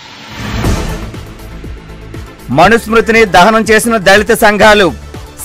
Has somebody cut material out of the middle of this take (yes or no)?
yes